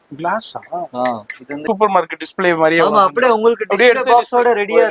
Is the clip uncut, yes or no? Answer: no